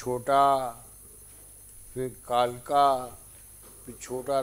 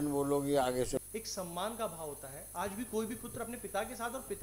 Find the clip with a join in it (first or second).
second